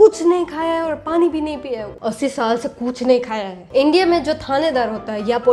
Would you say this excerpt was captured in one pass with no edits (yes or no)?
no